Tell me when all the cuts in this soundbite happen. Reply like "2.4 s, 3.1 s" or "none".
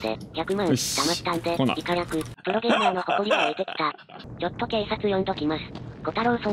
2.3 s, 4.1 s